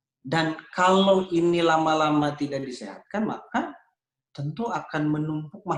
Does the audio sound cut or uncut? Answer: uncut